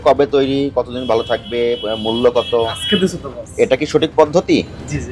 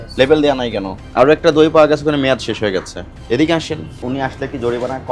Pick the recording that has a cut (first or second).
second